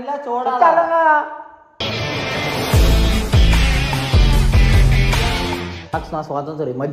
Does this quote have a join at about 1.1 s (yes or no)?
no